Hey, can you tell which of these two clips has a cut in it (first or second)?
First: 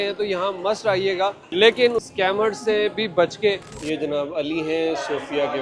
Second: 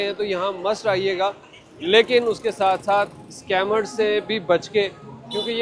first